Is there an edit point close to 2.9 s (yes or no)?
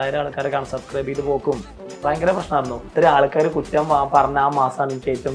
yes